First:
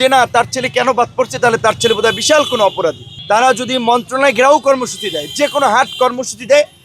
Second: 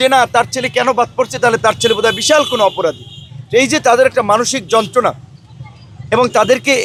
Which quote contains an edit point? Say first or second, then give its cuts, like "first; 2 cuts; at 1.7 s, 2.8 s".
first; 1 cut; at 3.1 s